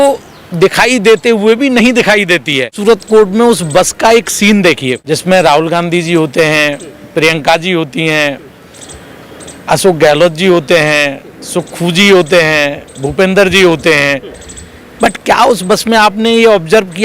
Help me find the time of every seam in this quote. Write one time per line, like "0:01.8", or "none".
0:02.7
0:05.0